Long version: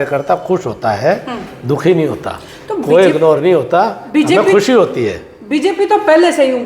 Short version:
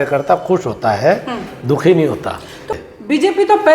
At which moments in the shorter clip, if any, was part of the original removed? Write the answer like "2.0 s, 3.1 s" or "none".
2.8 s